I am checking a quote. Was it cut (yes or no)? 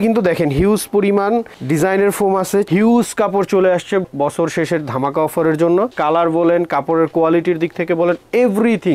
yes